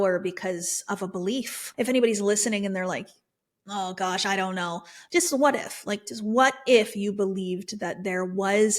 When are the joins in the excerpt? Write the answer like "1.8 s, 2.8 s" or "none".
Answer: 1.6 s